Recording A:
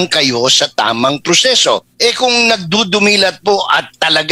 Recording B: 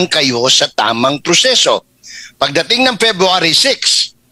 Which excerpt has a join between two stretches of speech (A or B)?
A